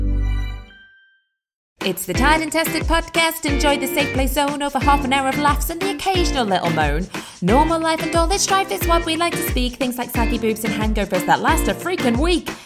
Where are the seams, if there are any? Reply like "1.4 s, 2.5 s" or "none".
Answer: 1.8 s